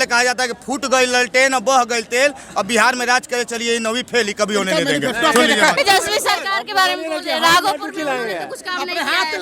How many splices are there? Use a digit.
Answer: 1